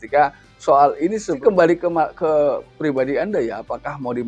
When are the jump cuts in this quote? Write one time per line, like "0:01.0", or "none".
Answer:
0:01.4